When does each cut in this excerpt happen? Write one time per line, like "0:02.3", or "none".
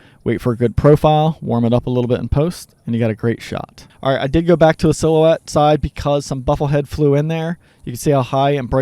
0:03.8